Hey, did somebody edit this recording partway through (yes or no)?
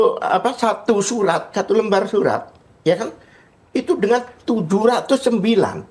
no